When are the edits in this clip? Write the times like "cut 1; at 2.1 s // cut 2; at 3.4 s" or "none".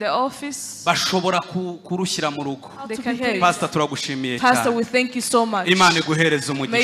cut 1; at 3.1 s

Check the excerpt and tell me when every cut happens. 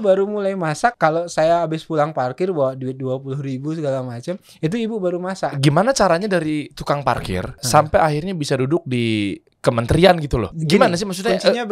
cut 1; at 1.0 s // cut 2; at 5.6 s // cut 3; at 7.6 s // cut 4; at 9.5 s // cut 5; at 10.5 s

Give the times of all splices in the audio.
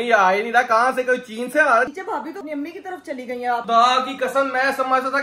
cut 1; at 1.9 s // cut 2; at 3.6 s

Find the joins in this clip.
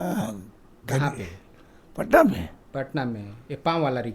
none

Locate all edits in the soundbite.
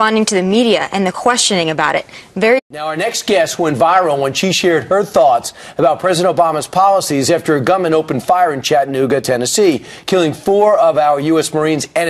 none

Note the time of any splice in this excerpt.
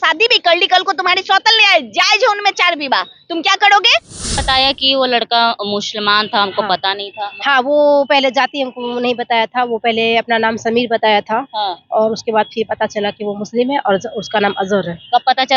cut 1; at 4.3 s

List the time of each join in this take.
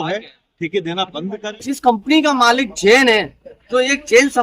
cut 1; at 1.4 s

